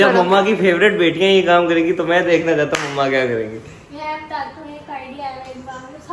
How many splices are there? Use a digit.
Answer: 0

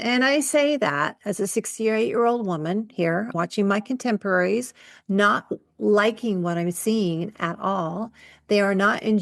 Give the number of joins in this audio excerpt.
1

